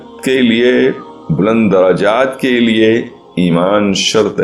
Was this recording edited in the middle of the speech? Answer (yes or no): no